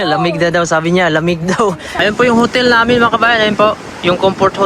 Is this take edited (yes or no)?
yes